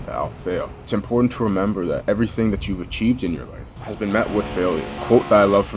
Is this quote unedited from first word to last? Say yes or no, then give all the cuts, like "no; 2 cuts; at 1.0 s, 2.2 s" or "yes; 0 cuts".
no; 2 cuts; at 0.8 s, 3.7 s